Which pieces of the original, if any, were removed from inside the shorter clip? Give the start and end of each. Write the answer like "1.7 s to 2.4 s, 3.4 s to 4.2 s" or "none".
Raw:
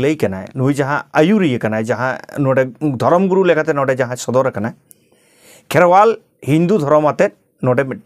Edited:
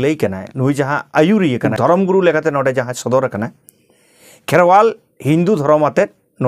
1.7 s to 2.9 s